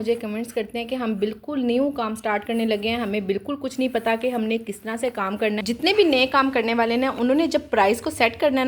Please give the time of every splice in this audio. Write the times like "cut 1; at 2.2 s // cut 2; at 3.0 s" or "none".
cut 1; at 5.6 s